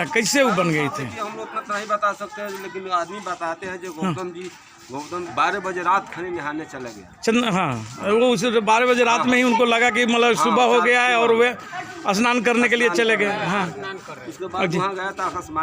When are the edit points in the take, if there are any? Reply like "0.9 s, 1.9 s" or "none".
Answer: 5.3 s